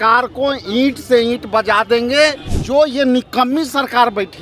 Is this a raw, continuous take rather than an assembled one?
no; 1 cut; at 2.5 s

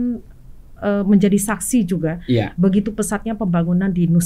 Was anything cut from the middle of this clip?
no; 0 cuts

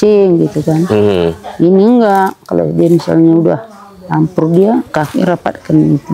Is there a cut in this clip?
no; 0 cuts

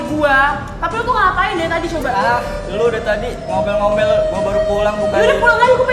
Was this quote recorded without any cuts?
yes; 0 cuts

